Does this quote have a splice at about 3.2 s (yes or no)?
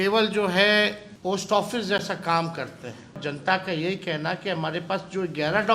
yes